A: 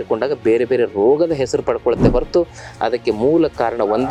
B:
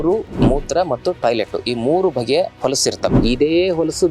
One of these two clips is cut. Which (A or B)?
B